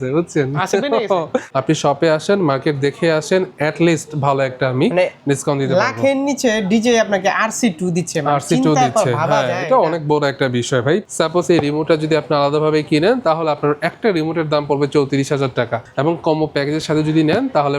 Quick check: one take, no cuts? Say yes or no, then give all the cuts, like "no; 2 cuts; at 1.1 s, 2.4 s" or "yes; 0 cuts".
no; 3 cuts; at 1.5 s, 11.0 s, 15.8 s